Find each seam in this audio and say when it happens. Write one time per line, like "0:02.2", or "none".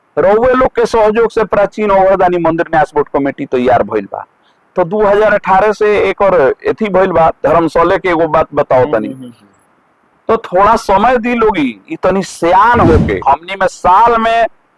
0:13.2